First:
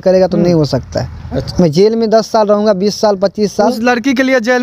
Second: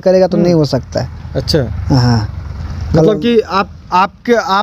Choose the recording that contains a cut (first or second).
first